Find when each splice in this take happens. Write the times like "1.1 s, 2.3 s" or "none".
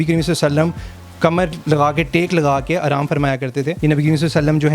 3.7 s

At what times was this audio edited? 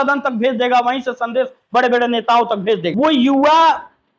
2.9 s

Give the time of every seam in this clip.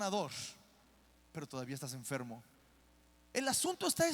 3.2 s

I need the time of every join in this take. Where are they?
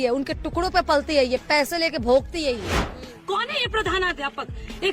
3.0 s

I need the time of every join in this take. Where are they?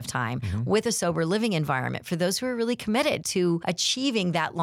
3.4 s

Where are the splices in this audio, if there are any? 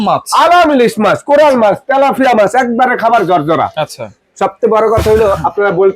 none

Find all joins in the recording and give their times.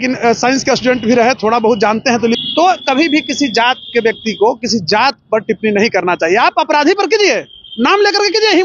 2.4 s

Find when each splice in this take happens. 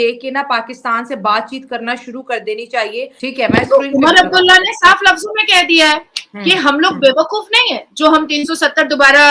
3.1 s

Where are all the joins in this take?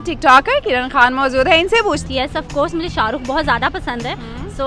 2.0 s

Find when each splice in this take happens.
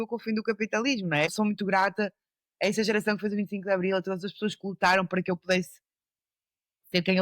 1.3 s

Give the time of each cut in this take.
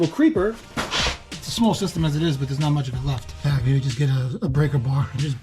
1.2 s, 3.4 s

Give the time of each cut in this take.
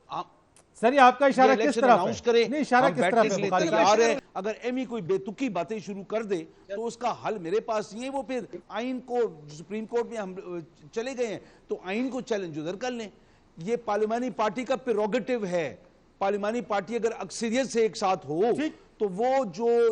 4.2 s

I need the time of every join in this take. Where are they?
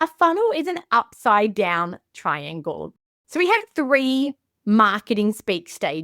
3.1 s

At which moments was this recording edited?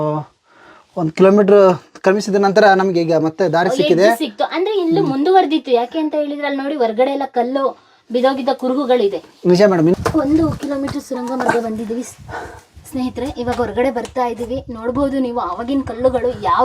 9.9 s

